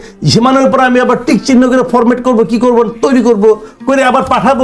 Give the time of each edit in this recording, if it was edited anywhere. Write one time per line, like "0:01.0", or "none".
none

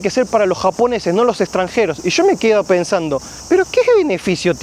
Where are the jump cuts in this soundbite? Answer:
0:03.3

